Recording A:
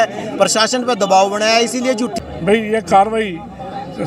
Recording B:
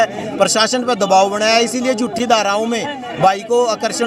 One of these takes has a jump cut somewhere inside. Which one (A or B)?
A